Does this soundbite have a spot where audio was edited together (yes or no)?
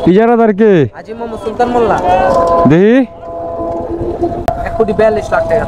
yes